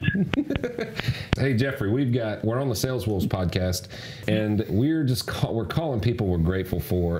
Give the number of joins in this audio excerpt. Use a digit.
2